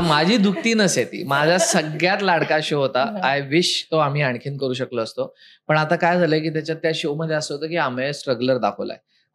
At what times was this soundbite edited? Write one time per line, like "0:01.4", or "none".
none